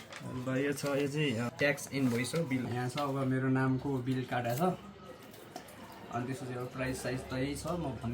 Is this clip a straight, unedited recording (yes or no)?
no